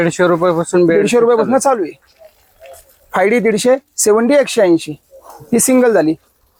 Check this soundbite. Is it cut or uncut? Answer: uncut